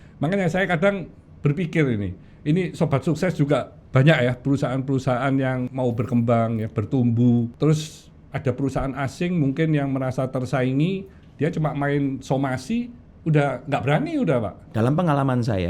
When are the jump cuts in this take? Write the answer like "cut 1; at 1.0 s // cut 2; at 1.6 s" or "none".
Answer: cut 1; at 5.7 s // cut 2; at 7.5 s // cut 3; at 14.6 s